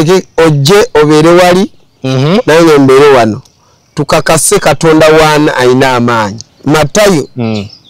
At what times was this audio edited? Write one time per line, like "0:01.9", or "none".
0:06.4